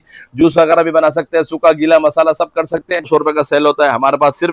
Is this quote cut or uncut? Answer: cut